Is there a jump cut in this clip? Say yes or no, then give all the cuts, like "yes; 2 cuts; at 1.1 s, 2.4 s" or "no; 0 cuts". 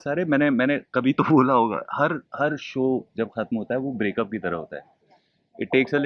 no; 0 cuts